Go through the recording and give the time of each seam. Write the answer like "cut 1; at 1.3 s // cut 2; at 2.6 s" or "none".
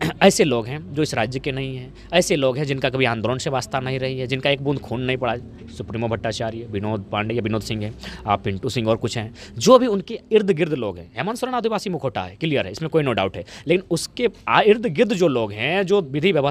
none